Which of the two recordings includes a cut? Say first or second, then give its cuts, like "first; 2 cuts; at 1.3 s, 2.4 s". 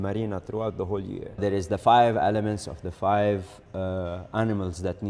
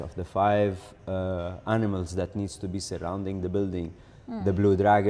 first; 1 cut; at 1.4 s